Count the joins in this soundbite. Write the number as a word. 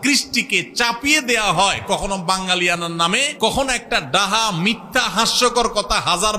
one